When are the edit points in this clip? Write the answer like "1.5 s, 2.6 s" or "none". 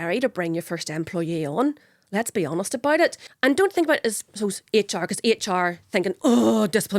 3.3 s